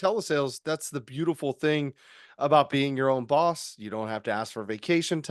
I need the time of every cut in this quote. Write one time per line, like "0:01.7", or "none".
none